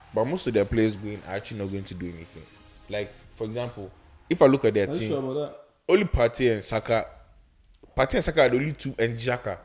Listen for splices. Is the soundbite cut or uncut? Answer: uncut